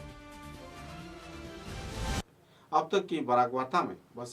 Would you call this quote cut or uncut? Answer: uncut